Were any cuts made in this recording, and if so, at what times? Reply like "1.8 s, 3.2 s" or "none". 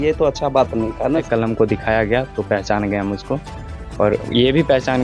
1.3 s